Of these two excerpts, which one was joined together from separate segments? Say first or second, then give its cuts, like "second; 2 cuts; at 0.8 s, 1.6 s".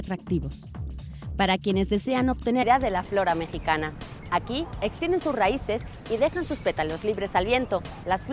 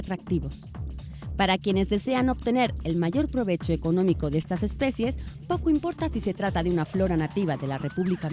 second; 1 cut; at 2.6 s